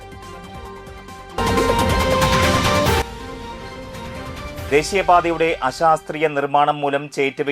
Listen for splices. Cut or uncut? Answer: cut